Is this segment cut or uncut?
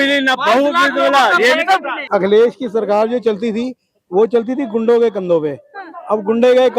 cut